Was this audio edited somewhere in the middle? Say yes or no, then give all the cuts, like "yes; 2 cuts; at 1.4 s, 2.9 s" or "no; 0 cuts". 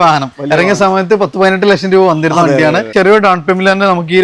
yes; 1 cut; at 2.9 s